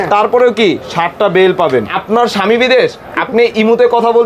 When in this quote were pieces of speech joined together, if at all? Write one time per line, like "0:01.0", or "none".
0:01.9